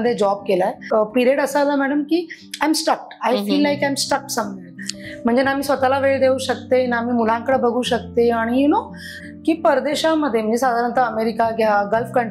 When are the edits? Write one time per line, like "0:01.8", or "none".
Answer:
0:00.8
0:09.1